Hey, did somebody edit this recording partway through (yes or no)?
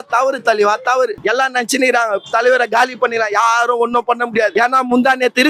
yes